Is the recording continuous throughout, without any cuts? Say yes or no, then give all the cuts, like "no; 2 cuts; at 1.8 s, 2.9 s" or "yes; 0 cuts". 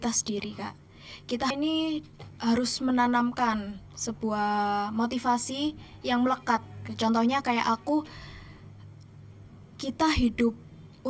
no; 1 cut; at 1.5 s